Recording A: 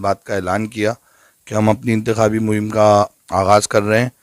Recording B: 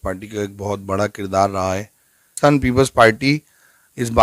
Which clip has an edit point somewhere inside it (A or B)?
B